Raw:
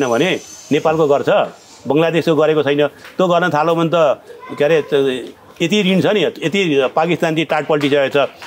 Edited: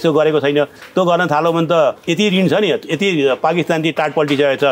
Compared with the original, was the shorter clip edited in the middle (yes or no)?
yes